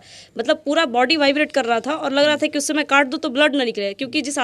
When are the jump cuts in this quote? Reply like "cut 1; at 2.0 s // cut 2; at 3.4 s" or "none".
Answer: none